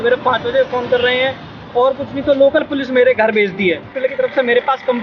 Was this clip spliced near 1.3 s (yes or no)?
no